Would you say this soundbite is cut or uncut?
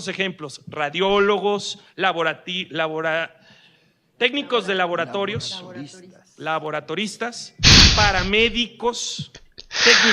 cut